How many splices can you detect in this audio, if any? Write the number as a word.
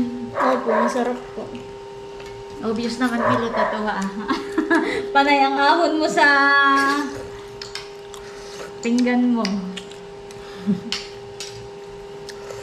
zero